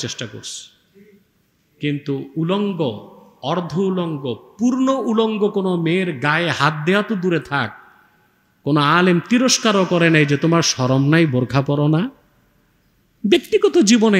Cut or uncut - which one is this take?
uncut